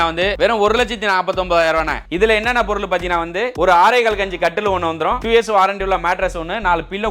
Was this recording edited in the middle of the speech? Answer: yes; 1 cut; at 2.1 s

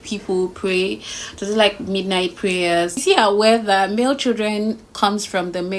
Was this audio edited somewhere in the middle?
yes; 1 cut; at 3.0 s

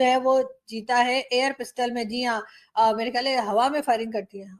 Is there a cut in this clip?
no; 0 cuts

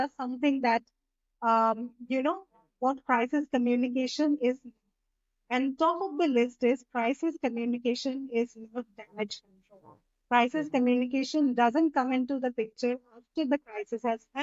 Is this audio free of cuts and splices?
yes; 0 cuts

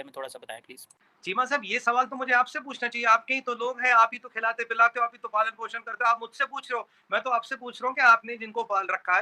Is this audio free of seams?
yes; 0 cuts

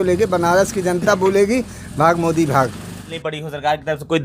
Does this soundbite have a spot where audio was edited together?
yes; 1 cut; at 3.2 s

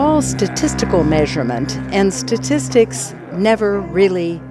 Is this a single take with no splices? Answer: yes; 0 cuts

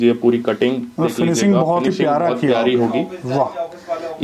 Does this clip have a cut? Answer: no; 0 cuts

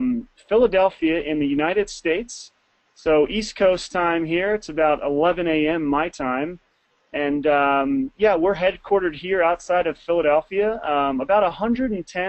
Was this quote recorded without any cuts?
yes; 0 cuts

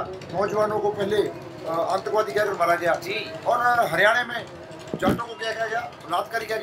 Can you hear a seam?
no; 0 cuts

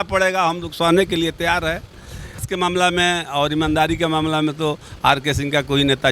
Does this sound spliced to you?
yes; 1 cut; at 2.5 s

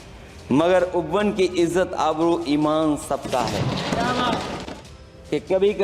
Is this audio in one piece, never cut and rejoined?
no; 1 cut; at 4.6 s

